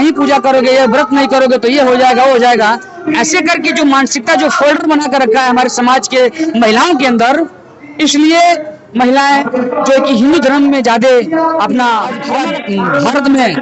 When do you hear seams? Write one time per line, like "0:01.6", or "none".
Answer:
0:12.3